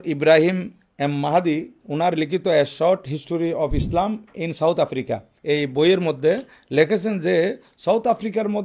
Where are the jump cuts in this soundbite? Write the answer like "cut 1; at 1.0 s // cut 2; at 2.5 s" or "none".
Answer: cut 1; at 5.3 s